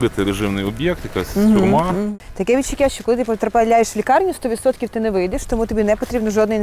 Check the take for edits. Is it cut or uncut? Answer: cut